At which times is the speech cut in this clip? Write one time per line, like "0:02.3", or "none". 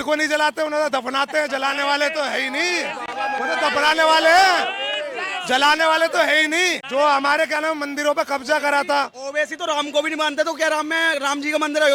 none